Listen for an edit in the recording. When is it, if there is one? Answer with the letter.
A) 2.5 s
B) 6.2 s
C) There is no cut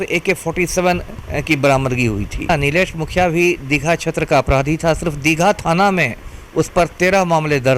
A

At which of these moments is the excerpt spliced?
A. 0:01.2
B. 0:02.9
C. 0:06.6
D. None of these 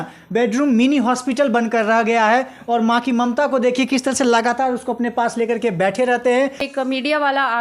C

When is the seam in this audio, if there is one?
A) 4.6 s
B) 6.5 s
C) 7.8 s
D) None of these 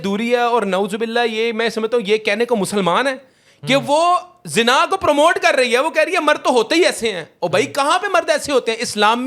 D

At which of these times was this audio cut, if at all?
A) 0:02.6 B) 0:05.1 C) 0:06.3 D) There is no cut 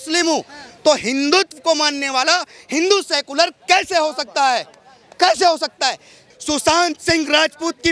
C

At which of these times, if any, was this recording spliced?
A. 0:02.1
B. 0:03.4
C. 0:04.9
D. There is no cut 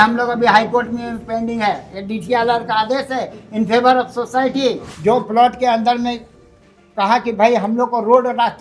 C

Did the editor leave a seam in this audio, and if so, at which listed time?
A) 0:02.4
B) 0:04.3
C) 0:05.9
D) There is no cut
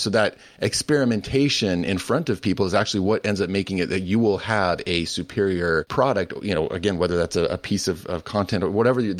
C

